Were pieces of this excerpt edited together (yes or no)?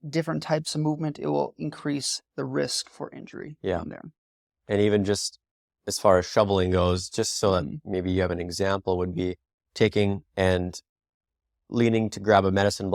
no